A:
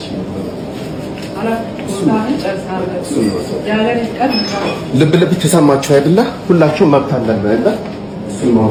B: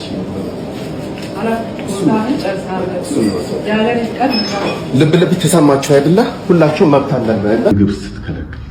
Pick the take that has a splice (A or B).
B